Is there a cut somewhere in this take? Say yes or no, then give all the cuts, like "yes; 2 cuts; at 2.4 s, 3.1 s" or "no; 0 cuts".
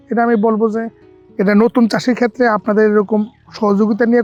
no; 0 cuts